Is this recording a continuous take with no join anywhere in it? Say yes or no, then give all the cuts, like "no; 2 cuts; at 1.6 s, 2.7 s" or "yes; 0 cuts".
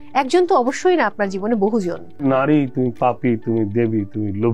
no; 1 cut; at 2.2 s